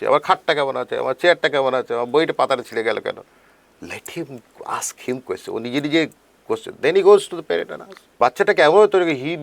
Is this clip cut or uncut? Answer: cut